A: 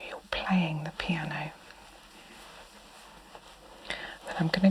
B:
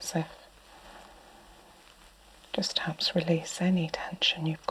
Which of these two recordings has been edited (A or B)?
A